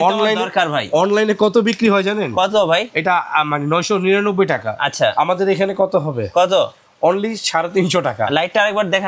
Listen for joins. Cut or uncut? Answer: uncut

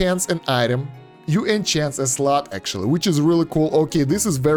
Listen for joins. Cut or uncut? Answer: uncut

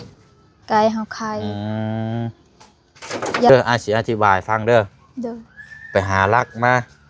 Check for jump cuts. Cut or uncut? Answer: cut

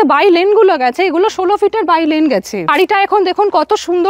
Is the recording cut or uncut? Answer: cut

